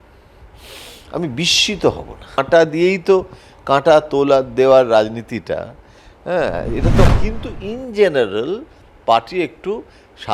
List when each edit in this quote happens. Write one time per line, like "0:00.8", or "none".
0:02.4
0:07.1